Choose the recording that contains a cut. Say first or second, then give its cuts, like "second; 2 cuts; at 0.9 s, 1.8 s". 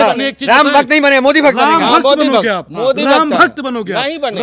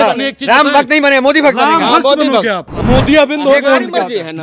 second; 1 cut; at 2.7 s